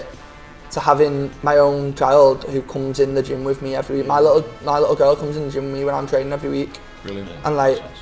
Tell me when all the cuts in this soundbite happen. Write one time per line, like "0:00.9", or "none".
0:01.3